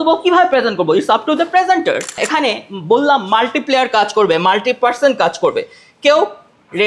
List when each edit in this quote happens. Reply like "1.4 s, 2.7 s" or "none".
2.1 s